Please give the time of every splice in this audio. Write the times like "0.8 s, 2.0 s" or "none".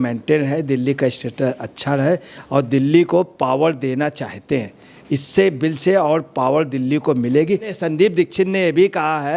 7.7 s